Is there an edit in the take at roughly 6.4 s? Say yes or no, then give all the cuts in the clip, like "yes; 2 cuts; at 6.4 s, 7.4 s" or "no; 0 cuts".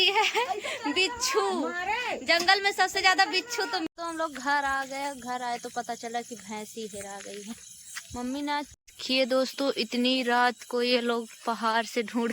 no; 2 cuts; at 3.9 s, 8.7 s